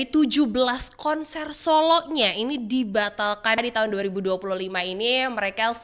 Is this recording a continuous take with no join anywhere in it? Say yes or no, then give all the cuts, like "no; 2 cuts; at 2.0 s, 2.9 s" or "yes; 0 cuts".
no; 1 cut; at 3.6 s